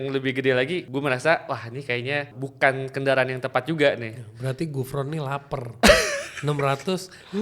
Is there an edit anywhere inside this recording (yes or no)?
yes